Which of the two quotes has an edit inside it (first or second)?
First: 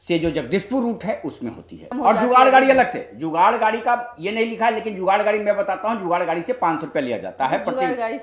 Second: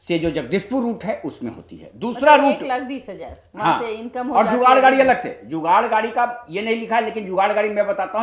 first